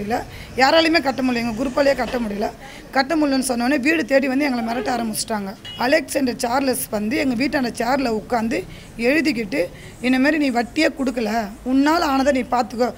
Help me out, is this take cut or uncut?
cut